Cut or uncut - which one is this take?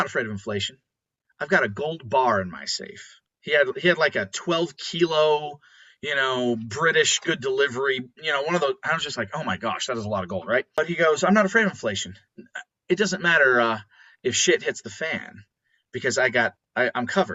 cut